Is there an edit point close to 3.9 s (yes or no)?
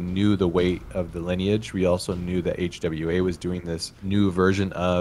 yes